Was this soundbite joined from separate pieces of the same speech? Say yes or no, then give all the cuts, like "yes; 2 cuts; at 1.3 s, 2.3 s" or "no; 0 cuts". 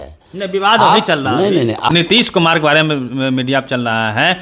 yes; 1 cut; at 1.9 s